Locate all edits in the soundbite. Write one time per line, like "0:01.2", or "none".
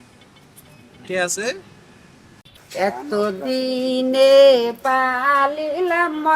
0:02.3